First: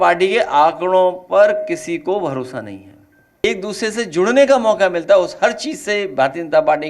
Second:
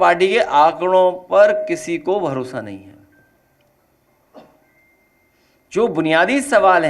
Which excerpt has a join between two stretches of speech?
first; 1 cut; at 3.4 s

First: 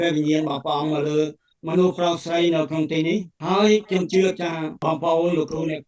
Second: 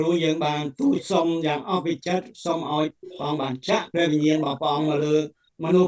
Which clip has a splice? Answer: first; 2 cuts; at 3.3 s, 4.7 s

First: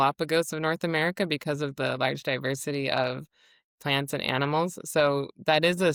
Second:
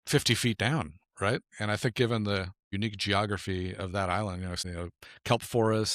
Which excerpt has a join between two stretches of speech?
second; 2 cuts; at 2.7 s, 4.6 s

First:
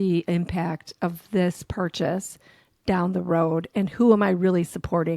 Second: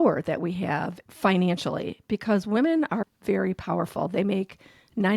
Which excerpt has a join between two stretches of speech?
second; 1 cut; at 1.0 s

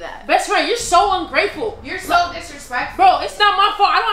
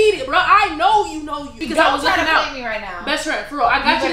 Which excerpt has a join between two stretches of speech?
second; 1 cut; at 1.6 s

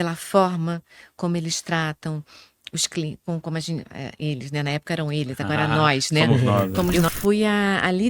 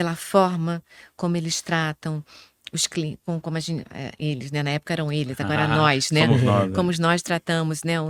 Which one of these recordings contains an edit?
first; 1 cut; at 7.0 s

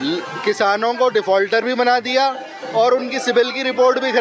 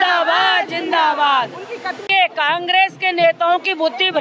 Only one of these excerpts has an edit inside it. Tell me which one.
second; 1 cut; at 2.0 s

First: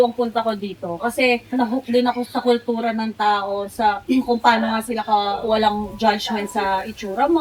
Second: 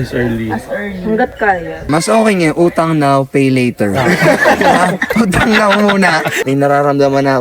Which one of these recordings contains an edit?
second; 2 cuts; at 1.9 s, 6.4 s

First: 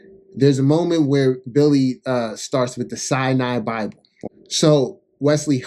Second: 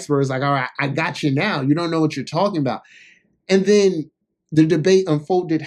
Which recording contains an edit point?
first; 1 cut; at 4.1 s

